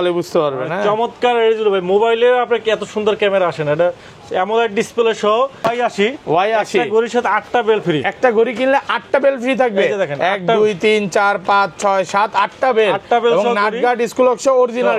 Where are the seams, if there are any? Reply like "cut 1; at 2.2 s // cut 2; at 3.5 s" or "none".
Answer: cut 1; at 5.7 s